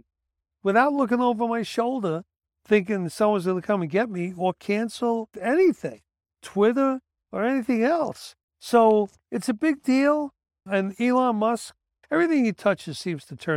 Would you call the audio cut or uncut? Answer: cut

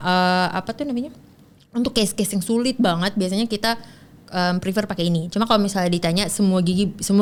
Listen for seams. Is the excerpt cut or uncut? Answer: uncut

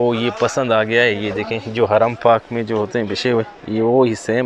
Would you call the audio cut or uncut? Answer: uncut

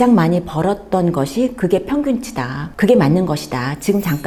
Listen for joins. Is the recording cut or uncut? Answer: uncut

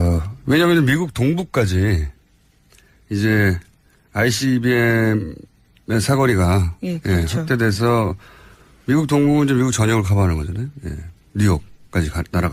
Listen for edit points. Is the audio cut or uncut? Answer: uncut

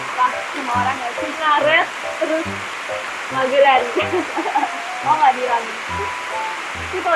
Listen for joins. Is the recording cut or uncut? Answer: uncut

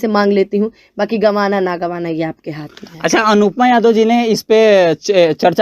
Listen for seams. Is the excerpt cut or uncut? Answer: uncut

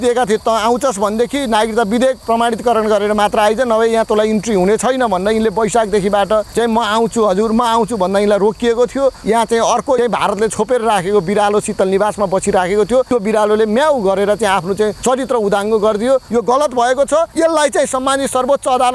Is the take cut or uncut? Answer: cut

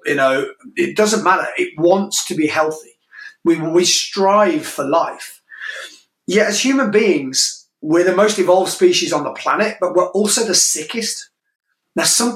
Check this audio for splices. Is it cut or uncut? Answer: uncut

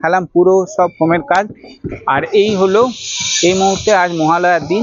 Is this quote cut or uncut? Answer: uncut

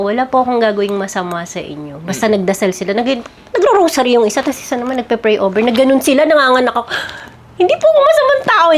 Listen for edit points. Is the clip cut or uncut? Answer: uncut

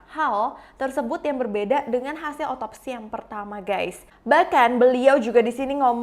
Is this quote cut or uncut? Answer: cut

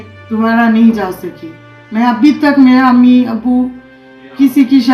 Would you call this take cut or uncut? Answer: uncut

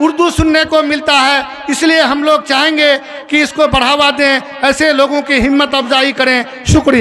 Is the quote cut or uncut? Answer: uncut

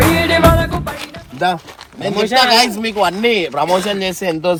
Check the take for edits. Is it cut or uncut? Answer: uncut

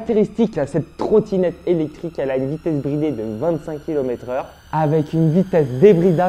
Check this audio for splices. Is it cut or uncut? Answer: uncut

